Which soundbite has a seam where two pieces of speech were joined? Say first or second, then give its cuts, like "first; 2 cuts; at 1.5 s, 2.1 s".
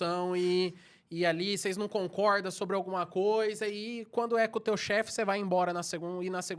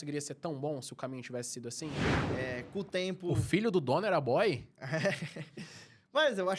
second; 1 cut; at 2.1 s